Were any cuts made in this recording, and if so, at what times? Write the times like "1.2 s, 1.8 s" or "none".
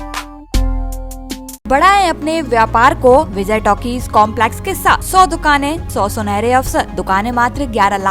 1.7 s, 3.4 s, 5.0 s, 5.8 s, 6.9 s